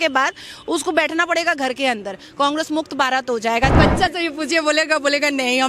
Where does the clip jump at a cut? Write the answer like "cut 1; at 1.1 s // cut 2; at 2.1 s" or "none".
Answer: cut 1; at 3.7 s

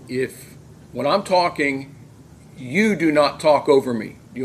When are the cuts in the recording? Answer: none

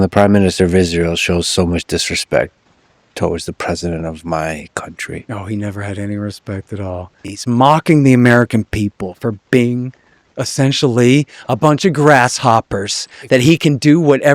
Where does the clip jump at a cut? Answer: cut 1; at 7.3 s

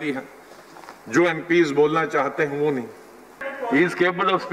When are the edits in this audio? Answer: cut 1; at 3.4 s

